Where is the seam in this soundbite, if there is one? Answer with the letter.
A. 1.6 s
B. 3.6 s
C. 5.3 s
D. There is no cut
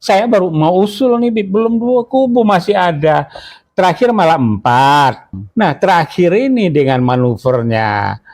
C